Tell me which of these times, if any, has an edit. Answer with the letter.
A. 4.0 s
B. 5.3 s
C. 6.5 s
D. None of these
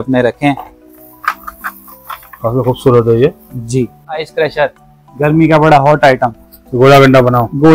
A